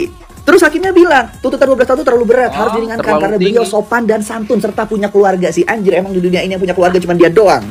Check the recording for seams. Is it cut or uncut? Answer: uncut